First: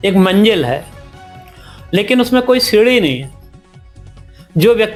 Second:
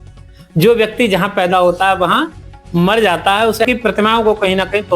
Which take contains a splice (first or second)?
second